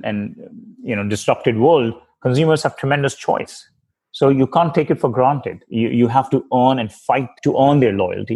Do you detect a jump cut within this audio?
yes; 1 cut; at 7.3 s

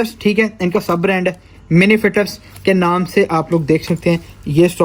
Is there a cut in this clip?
no; 0 cuts

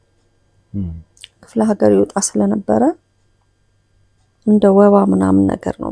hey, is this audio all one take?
yes; 0 cuts

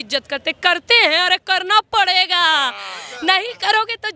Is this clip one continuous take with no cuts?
yes; 0 cuts

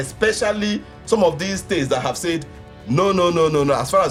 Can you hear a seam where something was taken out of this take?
no; 0 cuts

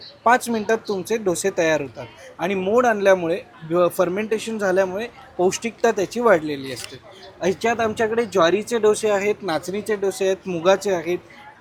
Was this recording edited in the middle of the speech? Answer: no; 0 cuts

